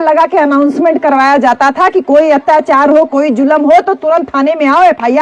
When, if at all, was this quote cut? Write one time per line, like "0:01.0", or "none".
none